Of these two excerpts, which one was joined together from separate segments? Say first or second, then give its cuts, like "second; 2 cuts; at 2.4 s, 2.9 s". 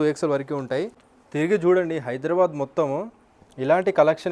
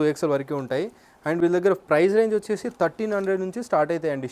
first; 1 cut; at 1.1 s